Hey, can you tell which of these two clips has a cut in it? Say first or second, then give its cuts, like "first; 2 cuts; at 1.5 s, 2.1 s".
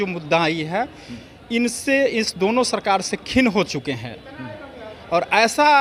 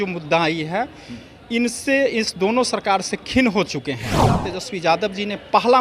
second; 1 cut; at 4.5 s